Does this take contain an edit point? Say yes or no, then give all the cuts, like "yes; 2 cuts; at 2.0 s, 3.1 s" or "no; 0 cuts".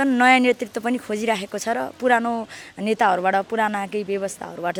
no; 0 cuts